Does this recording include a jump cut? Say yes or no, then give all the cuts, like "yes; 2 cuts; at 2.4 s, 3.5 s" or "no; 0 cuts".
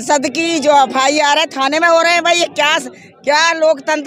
no; 0 cuts